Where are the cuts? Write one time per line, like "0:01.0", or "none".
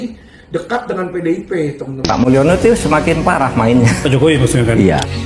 0:02.0